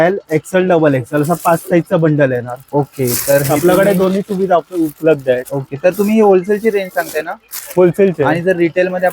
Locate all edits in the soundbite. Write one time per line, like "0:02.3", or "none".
none